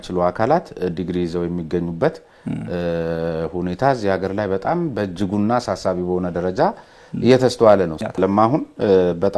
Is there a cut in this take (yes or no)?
yes